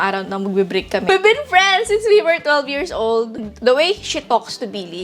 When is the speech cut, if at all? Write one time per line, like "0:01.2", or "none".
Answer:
0:01.1
0:03.4